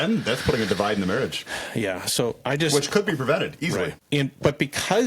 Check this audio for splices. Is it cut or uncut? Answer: cut